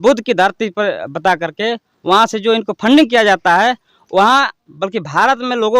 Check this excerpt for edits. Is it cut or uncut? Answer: uncut